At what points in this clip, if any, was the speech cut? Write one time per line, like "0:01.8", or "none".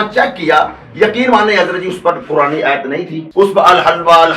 0:03.2